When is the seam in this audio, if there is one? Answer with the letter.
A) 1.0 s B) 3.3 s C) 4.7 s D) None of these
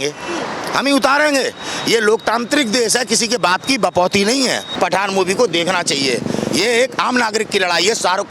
C